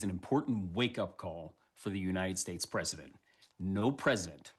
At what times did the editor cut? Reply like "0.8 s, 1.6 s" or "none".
3.3 s